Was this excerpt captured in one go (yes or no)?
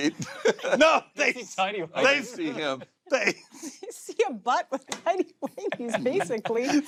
yes